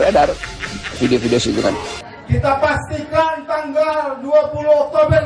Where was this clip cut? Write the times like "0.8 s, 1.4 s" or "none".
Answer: 1.9 s